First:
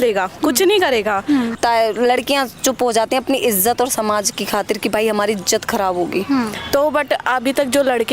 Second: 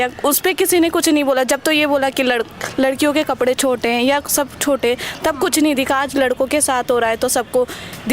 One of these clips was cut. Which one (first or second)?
first